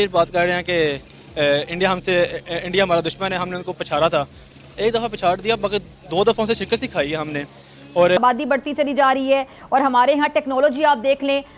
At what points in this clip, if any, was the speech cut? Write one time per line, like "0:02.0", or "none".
0:08.2

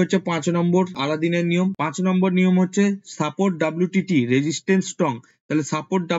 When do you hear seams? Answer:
none

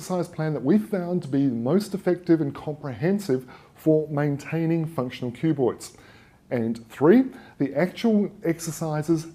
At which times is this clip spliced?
none

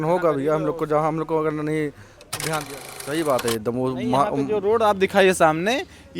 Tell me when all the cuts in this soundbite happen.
0:03.0

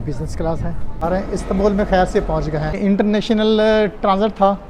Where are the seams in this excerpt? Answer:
0:01.0
0:02.8

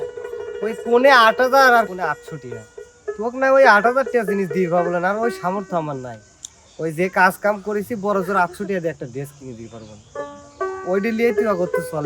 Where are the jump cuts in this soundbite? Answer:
0:01.9

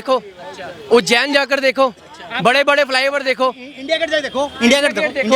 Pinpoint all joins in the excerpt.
none

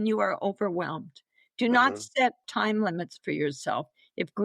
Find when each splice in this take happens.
0:02.4

